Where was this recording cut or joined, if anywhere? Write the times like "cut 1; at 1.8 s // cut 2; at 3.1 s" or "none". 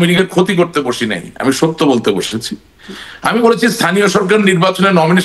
none